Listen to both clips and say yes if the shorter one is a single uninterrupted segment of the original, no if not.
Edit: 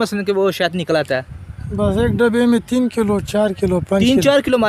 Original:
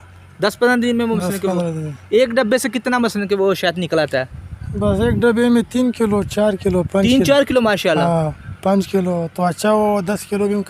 yes